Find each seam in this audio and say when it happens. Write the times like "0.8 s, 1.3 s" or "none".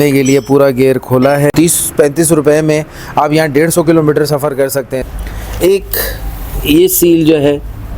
1.5 s, 5.0 s